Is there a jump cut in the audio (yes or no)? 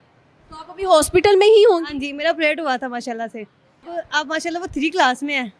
yes